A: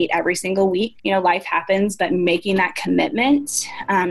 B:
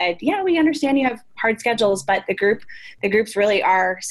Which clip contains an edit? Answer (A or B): A